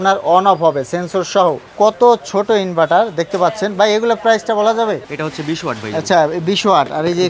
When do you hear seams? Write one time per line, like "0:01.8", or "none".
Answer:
0:01.6
0:05.2